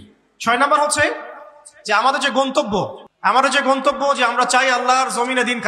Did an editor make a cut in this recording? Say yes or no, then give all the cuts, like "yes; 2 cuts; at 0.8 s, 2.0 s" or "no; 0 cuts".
yes; 1 cut; at 3.0 s